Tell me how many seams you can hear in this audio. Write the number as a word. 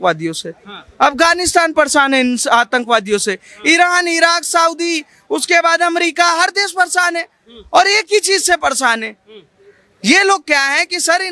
zero